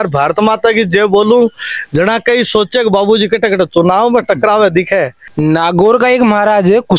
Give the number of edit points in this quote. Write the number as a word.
one